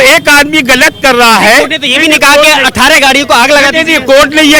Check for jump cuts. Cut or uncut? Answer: uncut